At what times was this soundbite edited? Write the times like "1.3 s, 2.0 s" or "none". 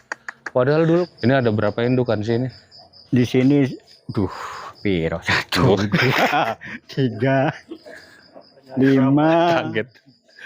1.1 s